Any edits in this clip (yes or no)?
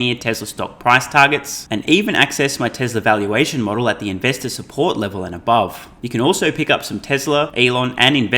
yes